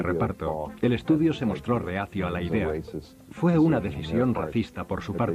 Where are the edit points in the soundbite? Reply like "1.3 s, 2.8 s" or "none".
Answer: none